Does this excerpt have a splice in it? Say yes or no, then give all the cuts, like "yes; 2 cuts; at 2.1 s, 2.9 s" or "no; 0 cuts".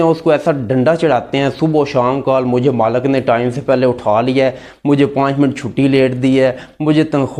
no; 0 cuts